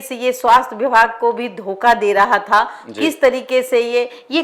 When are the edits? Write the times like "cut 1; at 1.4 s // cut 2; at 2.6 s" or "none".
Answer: none

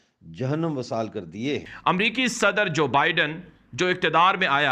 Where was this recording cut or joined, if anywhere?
cut 1; at 1.7 s

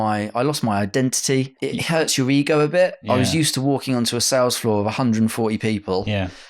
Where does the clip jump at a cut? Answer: cut 1; at 1.5 s

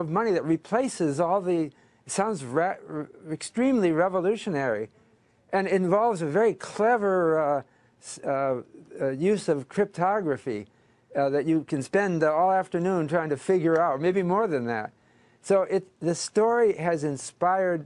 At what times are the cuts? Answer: none

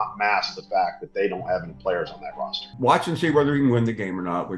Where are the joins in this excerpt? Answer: cut 1; at 2.6 s

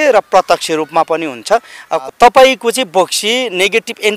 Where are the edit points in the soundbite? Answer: cut 1; at 2.0 s

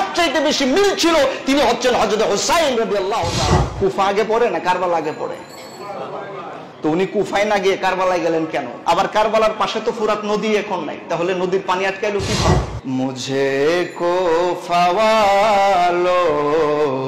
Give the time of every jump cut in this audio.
cut 1; at 3.7 s // cut 2; at 8.7 s // cut 3; at 12.7 s

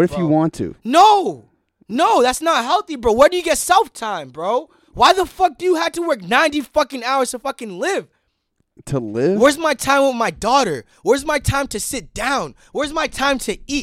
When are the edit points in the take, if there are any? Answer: none

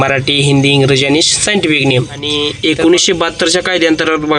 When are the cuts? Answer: cut 1; at 2.3 s

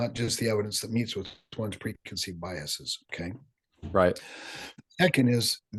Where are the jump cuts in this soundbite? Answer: none

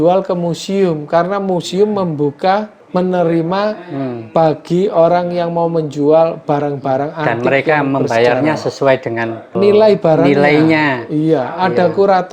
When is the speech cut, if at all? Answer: cut 1; at 2.8 s // cut 2; at 9.4 s

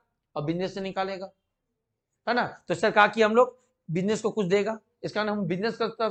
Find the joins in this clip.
none

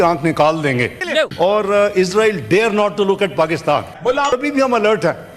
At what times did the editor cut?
cut 1; at 1.2 s // cut 2; at 4.3 s

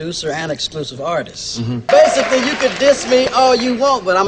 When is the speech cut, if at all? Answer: cut 1; at 1.9 s

